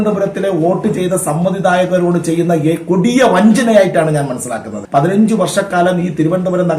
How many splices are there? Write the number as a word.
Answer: one